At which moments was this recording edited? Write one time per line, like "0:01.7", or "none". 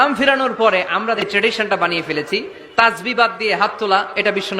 0:01.2